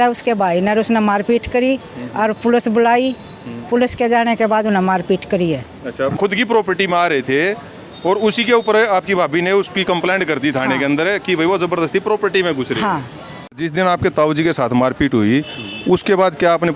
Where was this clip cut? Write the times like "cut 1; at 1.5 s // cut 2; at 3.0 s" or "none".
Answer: cut 1; at 6.2 s // cut 2; at 13.6 s